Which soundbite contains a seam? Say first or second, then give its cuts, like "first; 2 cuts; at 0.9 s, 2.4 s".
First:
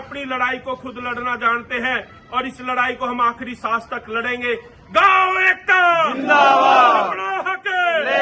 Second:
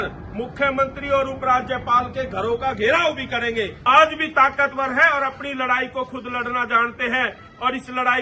second; 1 cut; at 3.8 s